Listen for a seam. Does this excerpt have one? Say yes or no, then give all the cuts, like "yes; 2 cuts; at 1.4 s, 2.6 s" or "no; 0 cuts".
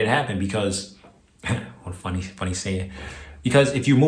no; 0 cuts